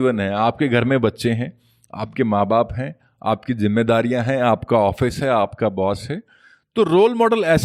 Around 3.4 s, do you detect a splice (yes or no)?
no